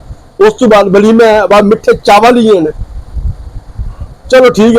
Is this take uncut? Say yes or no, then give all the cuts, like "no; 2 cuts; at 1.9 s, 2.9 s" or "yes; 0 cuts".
yes; 0 cuts